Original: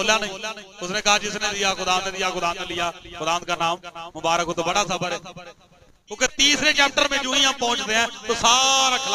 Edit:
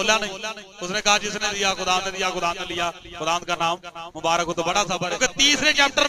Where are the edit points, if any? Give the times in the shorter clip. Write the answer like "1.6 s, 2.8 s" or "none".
5.1 s